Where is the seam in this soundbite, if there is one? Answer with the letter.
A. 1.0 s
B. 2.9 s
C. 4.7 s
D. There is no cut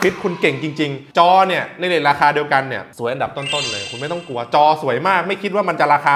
A